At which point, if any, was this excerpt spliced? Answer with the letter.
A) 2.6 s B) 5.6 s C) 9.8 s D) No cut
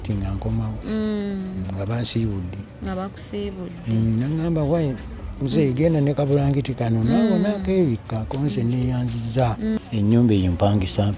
C